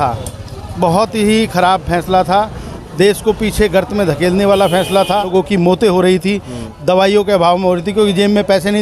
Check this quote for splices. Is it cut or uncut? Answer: cut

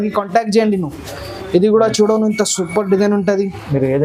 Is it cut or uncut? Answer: uncut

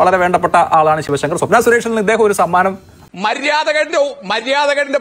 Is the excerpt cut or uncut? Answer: cut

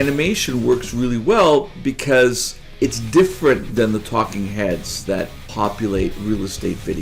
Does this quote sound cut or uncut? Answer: cut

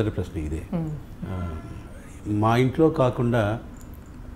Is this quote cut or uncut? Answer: uncut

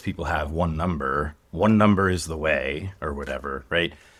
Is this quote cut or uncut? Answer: uncut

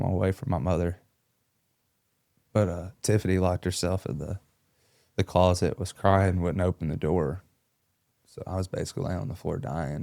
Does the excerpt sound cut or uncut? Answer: uncut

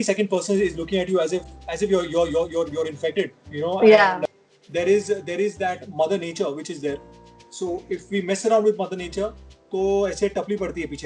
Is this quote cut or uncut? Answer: cut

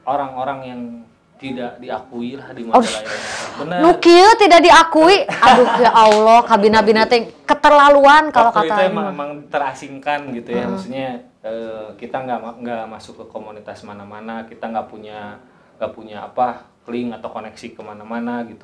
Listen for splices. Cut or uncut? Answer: uncut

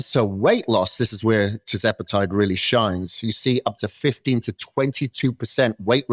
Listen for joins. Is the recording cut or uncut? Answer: uncut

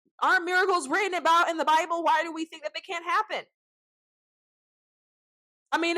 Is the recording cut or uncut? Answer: uncut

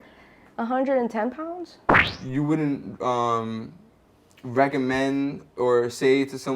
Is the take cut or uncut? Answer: cut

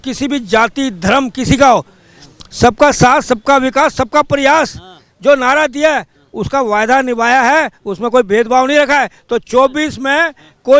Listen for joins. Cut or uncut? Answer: uncut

